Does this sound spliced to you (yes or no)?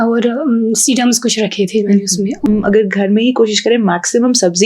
yes